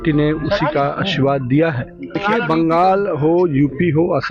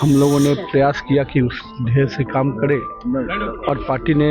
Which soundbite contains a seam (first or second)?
first